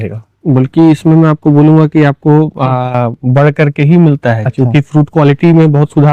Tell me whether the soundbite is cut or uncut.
uncut